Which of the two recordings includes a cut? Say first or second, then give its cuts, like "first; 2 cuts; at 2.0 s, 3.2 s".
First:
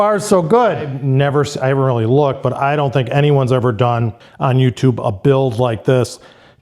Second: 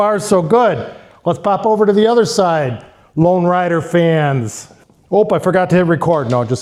first; 2 cuts; at 1.0 s, 4.2 s